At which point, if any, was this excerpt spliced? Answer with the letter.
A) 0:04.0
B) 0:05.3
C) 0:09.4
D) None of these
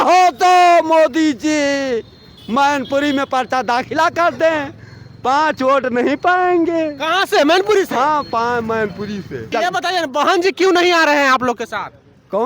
C